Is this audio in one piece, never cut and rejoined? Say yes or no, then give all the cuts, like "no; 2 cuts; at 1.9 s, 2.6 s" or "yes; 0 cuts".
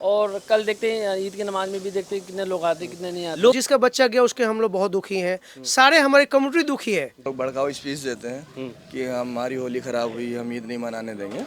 no; 2 cuts; at 3.6 s, 7.2 s